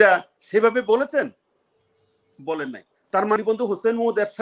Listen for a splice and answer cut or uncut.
cut